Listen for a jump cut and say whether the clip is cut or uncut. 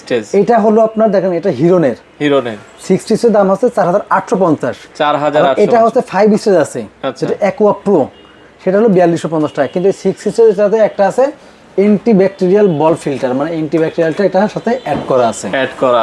uncut